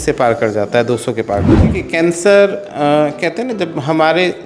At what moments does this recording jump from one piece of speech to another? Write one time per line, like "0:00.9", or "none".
0:01.5